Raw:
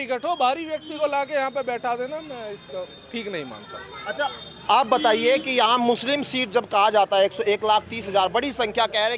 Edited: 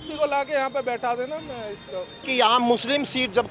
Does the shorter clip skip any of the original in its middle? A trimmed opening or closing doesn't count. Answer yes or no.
yes